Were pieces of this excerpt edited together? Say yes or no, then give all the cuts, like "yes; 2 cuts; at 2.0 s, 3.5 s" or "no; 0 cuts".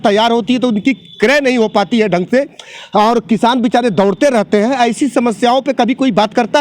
no; 0 cuts